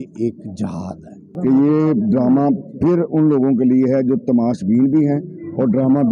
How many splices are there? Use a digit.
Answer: 1